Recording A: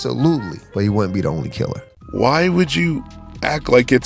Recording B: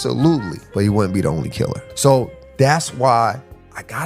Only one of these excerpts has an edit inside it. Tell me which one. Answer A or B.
B